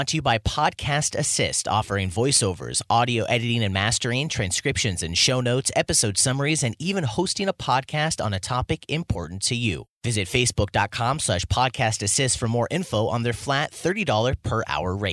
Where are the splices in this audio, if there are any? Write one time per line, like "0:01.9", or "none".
none